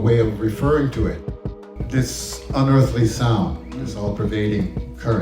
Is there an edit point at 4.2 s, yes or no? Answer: no